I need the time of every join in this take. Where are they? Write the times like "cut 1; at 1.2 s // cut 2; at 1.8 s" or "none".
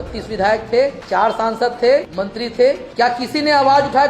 cut 1; at 1.0 s // cut 2; at 2.5 s